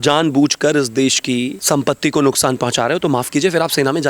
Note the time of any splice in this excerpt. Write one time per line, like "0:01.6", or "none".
0:01.6